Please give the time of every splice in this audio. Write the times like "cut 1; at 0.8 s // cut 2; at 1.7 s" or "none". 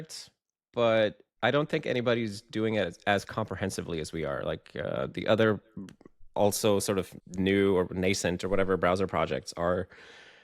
cut 1; at 1.3 s // cut 2; at 7.2 s